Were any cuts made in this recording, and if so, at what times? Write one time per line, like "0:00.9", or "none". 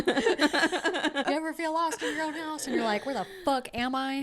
0:01.2